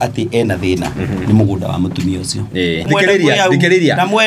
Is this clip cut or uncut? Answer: cut